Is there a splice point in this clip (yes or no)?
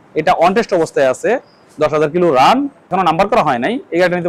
yes